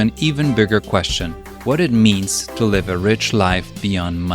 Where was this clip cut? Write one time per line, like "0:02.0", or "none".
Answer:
none